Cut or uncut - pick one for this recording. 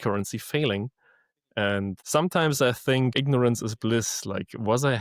cut